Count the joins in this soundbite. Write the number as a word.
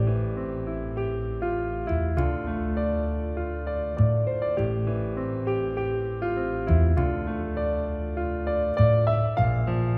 zero